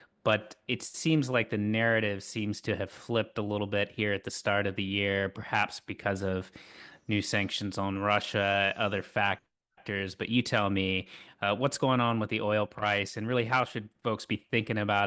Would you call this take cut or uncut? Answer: uncut